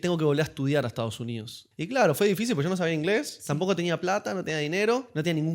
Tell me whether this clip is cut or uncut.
cut